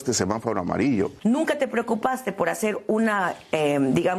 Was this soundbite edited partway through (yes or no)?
yes